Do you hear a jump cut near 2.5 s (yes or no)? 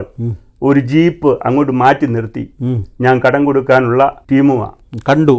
no